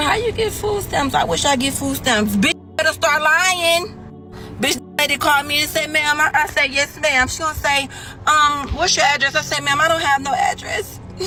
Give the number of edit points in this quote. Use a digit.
0